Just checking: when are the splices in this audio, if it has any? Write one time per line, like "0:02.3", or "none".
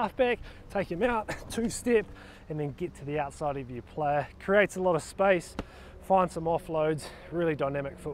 none